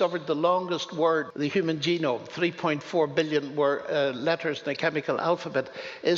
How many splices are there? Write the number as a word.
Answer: one